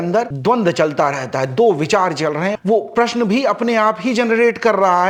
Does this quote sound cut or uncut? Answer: uncut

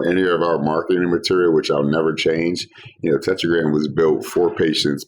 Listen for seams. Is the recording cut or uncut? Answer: uncut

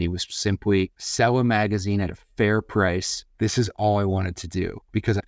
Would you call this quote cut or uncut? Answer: cut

